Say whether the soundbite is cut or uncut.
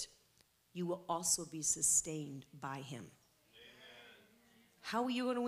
uncut